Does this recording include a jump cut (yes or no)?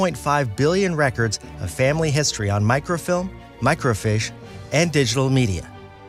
no